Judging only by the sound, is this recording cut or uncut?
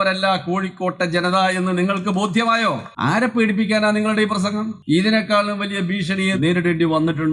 cut